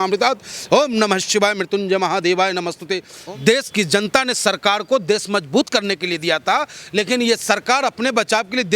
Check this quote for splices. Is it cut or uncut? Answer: cut